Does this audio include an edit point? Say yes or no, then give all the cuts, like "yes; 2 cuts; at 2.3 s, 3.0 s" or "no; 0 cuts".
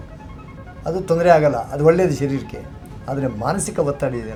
no; 0 cuts